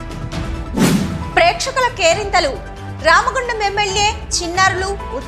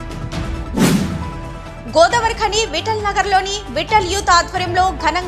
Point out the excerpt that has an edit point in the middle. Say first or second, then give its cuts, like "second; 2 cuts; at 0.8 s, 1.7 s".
second; 1 cut; at 1.0 s